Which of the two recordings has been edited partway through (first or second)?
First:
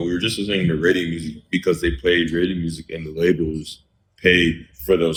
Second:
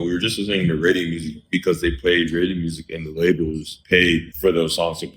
second